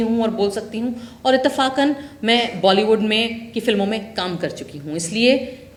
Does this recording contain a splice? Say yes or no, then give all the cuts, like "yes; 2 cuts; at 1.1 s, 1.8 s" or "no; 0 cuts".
no; 0 cuts